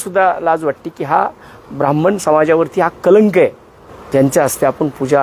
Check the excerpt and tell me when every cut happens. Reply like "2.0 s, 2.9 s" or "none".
none